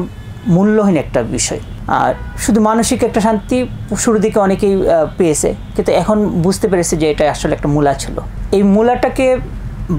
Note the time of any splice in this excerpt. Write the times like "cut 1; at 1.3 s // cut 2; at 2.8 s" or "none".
none